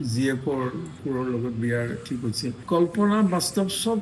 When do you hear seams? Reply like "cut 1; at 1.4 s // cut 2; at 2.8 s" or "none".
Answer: cut 1; at 1.0 s // cut 2; at 2.6 s